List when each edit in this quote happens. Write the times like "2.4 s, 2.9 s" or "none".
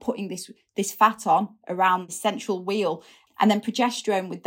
2.1 s, 3.1 s